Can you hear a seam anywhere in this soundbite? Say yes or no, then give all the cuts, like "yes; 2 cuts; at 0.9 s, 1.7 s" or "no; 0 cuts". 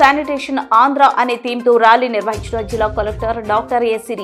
no; 0 cuts